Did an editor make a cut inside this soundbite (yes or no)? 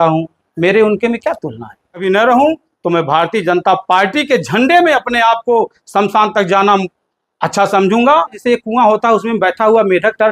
yes